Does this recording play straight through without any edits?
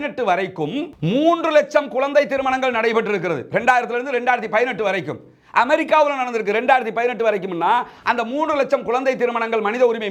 yes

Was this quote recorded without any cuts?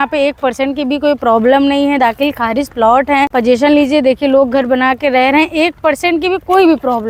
yes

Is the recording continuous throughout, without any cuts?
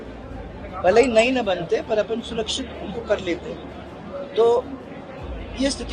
yes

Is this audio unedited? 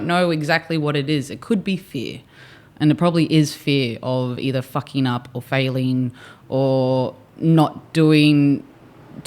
yes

